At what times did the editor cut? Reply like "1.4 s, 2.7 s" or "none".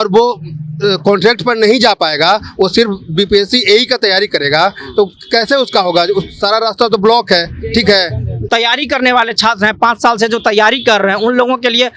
8.3 s